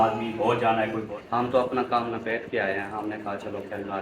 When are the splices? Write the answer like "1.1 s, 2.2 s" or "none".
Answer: 1.1 s